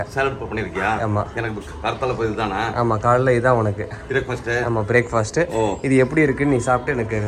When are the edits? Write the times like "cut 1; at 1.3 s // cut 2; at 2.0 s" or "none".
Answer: none